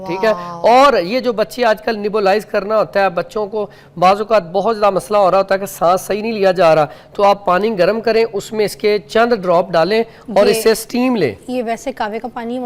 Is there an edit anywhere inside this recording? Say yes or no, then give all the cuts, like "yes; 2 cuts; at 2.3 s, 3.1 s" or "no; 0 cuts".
no; 0 cuts